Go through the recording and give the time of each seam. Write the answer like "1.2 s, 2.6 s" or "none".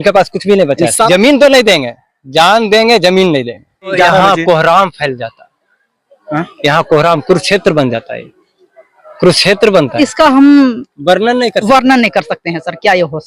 1.1 s, 3.9 s, 10.0 s